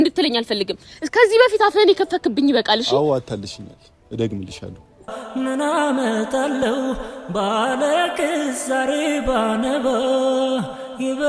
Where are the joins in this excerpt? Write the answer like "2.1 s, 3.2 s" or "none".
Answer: 5.2 s